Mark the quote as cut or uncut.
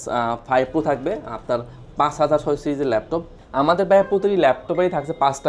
cut